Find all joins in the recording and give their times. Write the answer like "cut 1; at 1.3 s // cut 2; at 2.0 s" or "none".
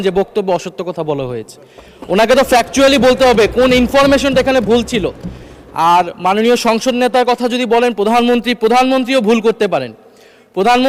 none